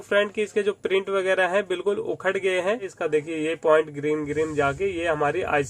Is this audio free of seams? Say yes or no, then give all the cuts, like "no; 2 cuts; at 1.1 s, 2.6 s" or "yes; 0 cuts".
no; 1 cut; at 2.9 s